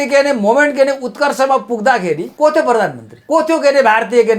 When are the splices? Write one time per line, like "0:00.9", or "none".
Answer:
0:02.3
0:03.1